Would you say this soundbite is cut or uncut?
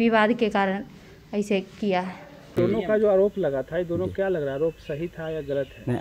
cut